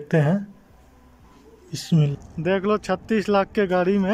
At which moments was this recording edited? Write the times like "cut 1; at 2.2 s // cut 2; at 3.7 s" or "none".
cut 1; at 2.1 s